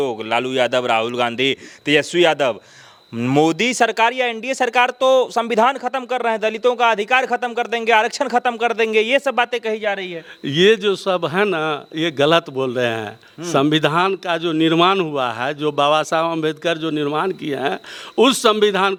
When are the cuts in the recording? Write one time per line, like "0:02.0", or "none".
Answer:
none